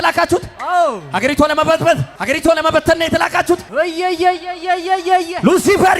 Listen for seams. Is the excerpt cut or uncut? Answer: cut